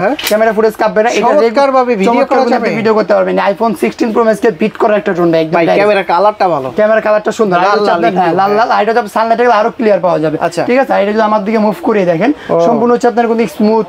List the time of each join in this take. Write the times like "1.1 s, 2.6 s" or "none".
none